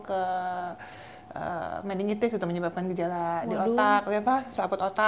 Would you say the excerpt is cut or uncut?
uncut